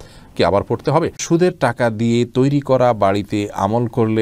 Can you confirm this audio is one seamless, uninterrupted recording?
no; 1 cut; at 1.2 s

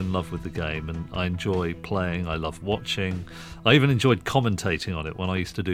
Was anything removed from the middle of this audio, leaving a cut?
no; 0 cuts

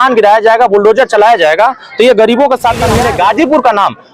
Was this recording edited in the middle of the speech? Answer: yes; 1 cut; at 2.9 s

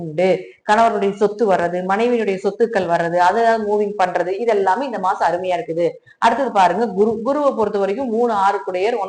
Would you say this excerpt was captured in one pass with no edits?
yes; 0 cuts

